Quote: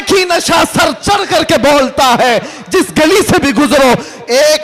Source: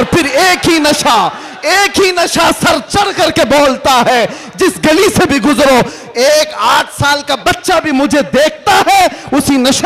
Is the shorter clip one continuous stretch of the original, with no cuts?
yes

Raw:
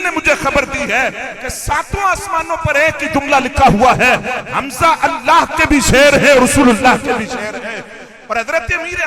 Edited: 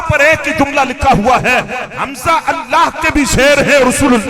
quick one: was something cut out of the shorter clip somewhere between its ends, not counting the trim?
no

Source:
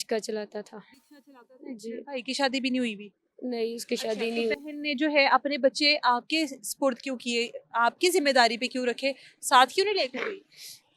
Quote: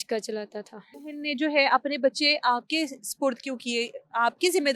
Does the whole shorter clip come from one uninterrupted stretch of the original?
no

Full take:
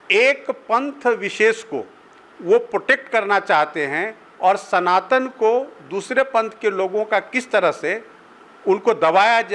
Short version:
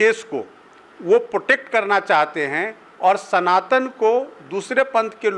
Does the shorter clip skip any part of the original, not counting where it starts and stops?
no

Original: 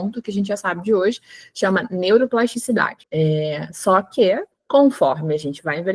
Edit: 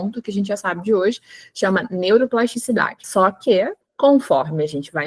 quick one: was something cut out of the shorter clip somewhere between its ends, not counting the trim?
yes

